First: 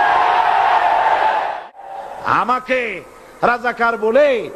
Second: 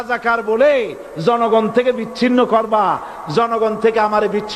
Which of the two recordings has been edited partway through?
first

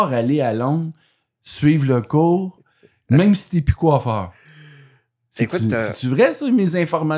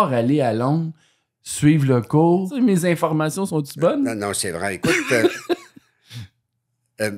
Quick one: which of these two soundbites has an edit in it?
second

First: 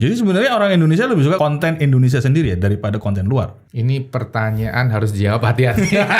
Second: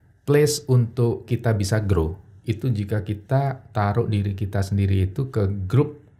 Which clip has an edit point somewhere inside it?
first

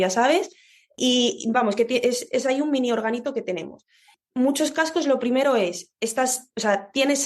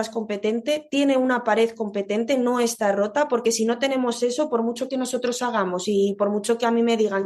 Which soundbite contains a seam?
first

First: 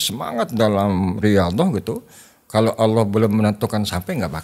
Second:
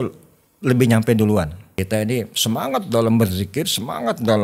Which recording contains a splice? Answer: second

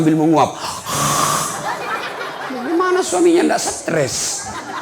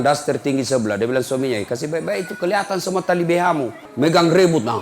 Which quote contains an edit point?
second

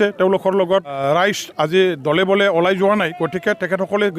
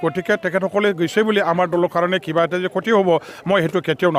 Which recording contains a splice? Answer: first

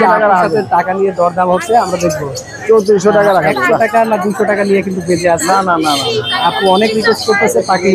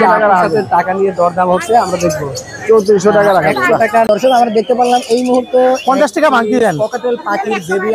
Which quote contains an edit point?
second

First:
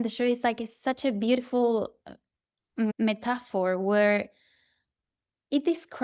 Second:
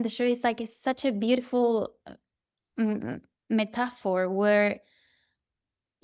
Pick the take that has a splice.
first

